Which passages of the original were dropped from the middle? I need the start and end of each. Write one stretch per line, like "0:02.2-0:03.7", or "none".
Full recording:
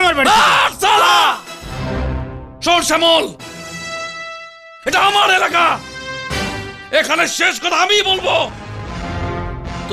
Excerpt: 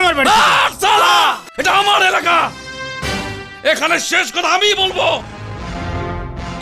0:01.5-0:04.8